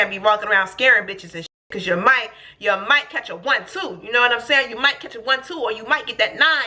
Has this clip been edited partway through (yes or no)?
no